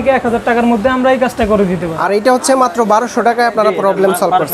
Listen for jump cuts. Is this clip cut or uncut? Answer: cut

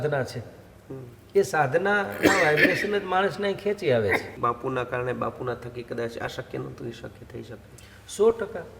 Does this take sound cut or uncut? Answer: cut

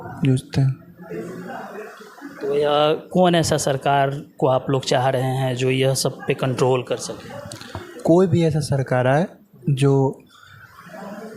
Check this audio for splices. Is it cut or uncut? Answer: uncut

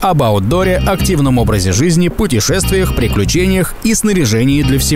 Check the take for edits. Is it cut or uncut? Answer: uncut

